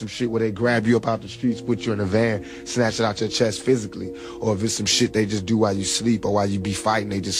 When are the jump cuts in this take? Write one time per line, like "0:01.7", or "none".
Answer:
none